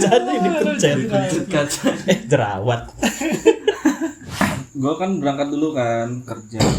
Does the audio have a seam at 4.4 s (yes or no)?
yes